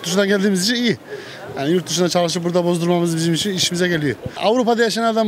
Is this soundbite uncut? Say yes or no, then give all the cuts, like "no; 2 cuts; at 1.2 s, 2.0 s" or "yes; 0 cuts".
no; 1 cut; at 4.3 s